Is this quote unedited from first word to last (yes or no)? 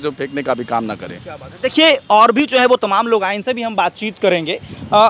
yes